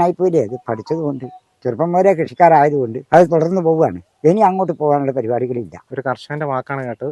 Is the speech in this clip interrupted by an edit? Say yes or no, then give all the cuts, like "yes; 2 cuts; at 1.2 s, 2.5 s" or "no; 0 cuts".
yes; 2 cuts; at 3.0 s, 5.8 s